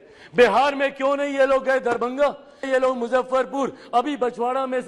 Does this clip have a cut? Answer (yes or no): yes